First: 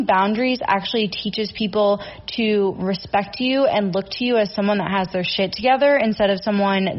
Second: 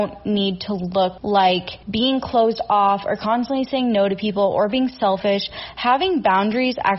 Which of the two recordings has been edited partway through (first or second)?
second